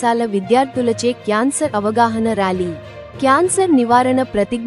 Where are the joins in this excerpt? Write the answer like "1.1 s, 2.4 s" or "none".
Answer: none